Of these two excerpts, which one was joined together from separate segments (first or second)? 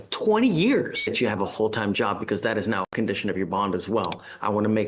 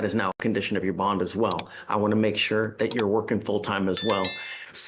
first